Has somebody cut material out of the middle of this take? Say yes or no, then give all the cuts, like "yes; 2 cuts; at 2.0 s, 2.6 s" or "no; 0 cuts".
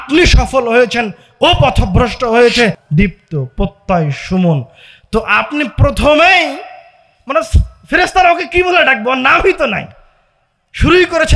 yes; 1 cut; at 2.8 s